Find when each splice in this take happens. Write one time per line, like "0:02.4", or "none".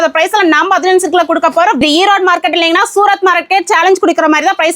0:01.8